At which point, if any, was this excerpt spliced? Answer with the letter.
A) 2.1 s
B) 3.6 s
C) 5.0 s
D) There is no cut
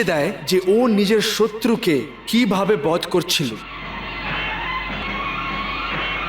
C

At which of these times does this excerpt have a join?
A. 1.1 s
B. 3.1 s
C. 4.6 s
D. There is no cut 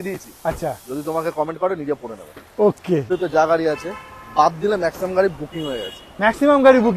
B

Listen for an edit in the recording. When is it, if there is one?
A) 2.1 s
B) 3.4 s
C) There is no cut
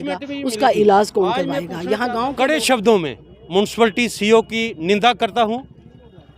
A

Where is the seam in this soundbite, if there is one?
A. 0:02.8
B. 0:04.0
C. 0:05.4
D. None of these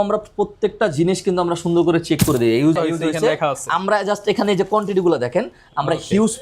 A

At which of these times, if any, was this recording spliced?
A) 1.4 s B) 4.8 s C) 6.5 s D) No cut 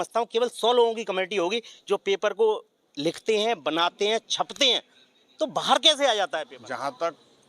C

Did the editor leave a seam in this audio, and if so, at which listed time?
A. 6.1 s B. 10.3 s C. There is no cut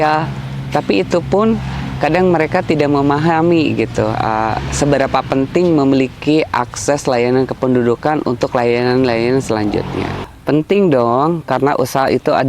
B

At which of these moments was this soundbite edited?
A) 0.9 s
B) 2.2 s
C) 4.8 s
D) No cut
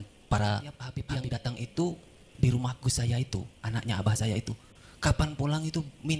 A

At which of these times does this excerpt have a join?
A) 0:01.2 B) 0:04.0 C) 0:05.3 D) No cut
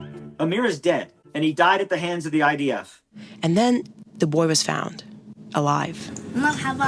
A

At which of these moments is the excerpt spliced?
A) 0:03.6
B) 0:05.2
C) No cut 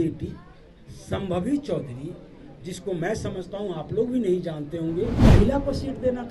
B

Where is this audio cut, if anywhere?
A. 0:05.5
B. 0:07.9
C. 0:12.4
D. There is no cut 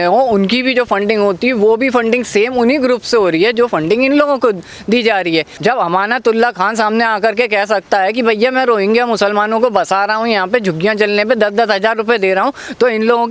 A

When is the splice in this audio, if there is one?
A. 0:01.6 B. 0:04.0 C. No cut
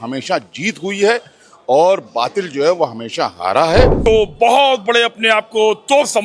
B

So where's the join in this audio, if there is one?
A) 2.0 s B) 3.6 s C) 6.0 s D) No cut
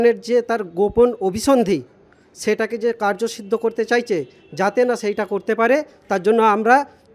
D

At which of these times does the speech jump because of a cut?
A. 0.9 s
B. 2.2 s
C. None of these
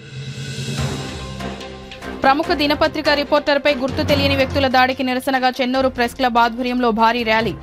A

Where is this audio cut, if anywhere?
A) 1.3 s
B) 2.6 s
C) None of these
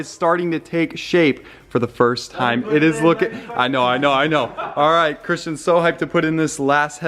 C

